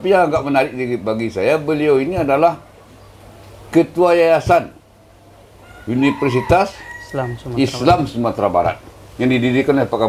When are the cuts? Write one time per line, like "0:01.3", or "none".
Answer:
none